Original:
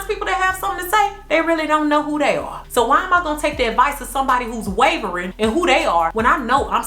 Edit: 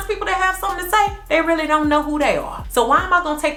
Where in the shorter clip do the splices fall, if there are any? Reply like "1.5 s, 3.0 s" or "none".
none